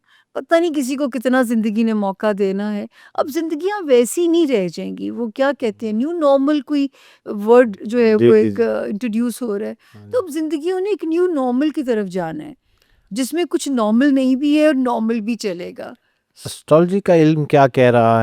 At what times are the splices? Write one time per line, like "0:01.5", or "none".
none